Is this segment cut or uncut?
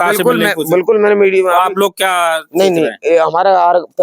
uncut